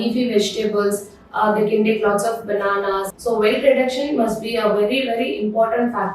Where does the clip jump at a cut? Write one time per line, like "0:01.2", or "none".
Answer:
0:03.1